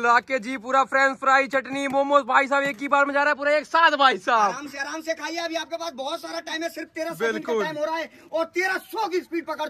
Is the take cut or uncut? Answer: uncut